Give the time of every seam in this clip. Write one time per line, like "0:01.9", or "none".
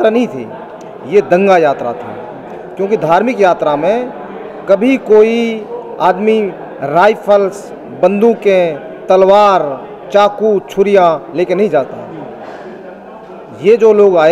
none